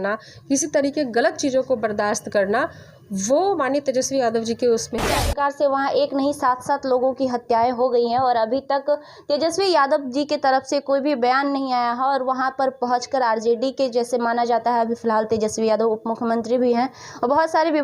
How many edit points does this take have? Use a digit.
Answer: 1